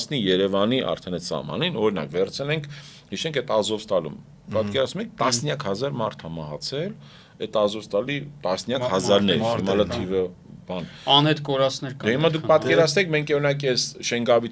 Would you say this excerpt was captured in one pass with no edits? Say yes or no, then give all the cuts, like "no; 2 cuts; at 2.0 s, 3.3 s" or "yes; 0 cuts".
yes; 0 cuts